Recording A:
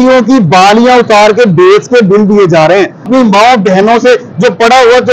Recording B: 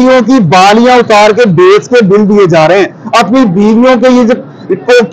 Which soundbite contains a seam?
A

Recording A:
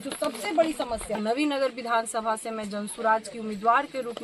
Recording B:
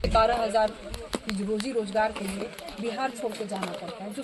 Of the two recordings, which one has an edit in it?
A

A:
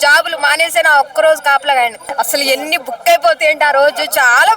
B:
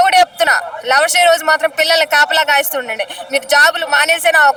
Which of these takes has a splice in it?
A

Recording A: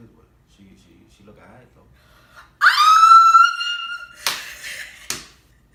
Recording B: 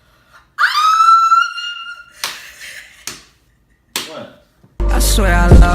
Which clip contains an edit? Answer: B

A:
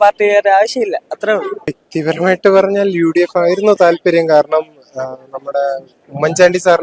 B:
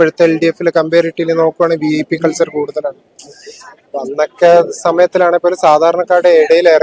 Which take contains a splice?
A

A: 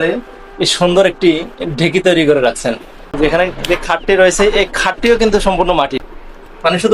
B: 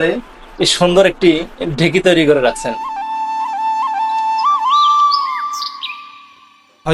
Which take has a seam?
A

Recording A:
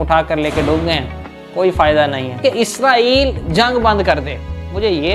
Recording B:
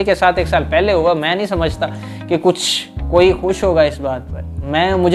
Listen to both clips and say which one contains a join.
A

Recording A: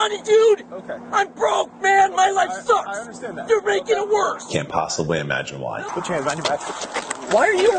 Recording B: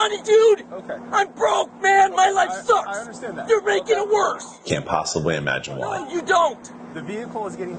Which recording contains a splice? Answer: A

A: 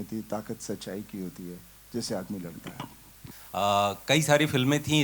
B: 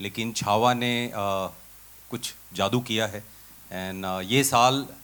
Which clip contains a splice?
A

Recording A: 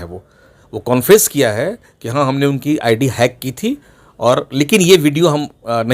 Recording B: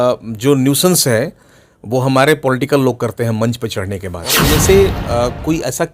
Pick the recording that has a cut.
B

